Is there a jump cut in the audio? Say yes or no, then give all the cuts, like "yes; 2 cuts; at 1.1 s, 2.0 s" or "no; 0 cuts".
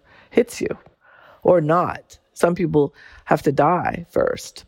yes; 1 cut; at 1.1 s